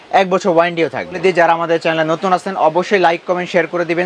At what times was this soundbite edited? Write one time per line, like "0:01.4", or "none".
0:01.2